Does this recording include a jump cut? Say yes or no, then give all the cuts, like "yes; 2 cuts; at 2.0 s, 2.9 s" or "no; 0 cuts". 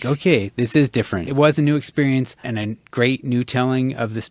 yes; 1 cut; at 1.2 s